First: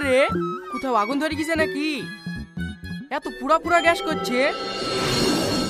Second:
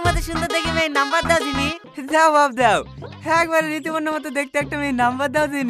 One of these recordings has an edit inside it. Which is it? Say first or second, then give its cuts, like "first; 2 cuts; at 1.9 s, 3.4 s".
second; 1 cut; at 1.9 s